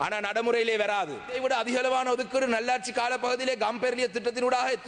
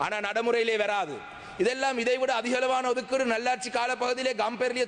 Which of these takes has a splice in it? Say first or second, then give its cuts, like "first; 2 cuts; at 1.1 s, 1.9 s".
first; 1 cut; at 1.4 s